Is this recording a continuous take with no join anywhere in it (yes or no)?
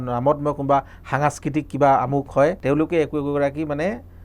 no